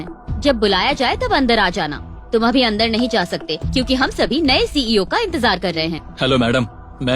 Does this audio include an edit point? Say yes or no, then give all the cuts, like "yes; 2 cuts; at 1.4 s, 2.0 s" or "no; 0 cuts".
yes; 1 cut; at 6.0 s